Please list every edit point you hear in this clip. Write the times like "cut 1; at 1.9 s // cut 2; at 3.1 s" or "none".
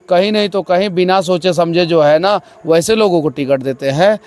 none